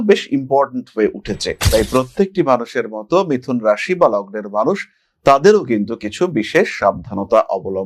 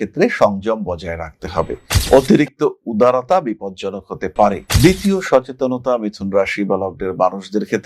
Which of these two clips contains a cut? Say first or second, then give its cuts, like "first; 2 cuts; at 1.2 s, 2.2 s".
second; 1 cut; at 4.6 s